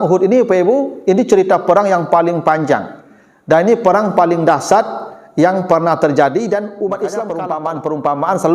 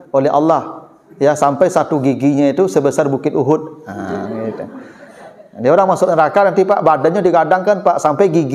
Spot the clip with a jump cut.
first; 1 cut; at 7.3 s

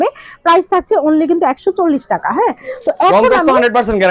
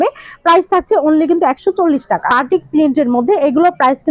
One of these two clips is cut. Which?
second; 1 cut; at 2.3 s

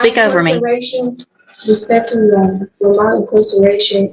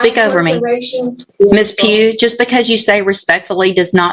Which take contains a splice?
second; 1 cut; at 1.3 s

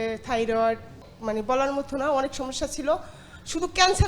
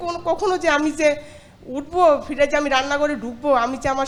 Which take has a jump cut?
first; 1 cut; at 1.1 s

